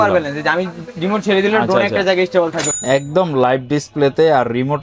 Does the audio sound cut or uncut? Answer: cut